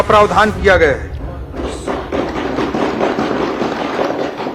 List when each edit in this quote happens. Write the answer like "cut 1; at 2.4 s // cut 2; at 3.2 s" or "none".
none

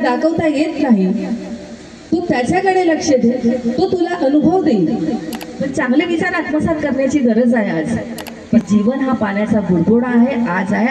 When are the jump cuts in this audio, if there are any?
cut 1; at 5.6 s // cut 2; at 8.4 s

